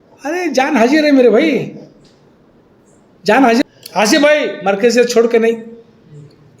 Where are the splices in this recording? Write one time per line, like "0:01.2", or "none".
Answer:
0:03.6